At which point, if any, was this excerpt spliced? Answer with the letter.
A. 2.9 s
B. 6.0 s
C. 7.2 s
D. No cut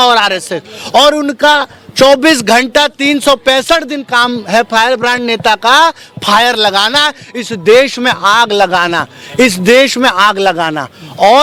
D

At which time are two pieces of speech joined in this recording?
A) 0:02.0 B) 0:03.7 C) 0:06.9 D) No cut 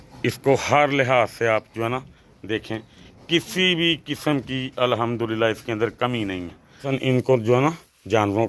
C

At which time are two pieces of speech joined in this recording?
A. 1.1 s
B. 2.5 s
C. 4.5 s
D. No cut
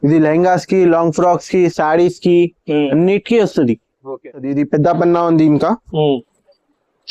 C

